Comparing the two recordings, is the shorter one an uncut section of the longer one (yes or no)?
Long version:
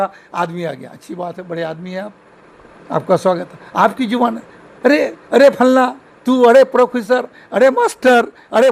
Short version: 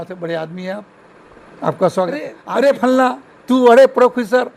no